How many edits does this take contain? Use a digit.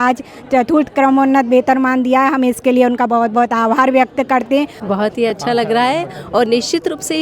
1